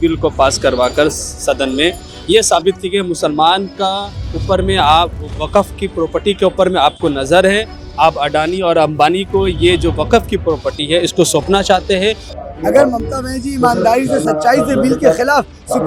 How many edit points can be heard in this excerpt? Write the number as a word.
one